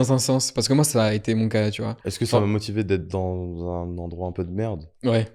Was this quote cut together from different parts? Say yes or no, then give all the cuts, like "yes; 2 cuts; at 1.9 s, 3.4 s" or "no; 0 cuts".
no; 0 cuts